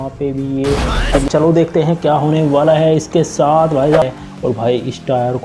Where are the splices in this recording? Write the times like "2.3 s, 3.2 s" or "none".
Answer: 1.3 s, 4.0 s